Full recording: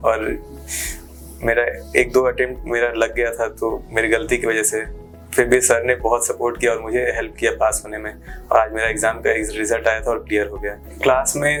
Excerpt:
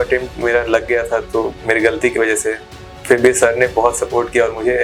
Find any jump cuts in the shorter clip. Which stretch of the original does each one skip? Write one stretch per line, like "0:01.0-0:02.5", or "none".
none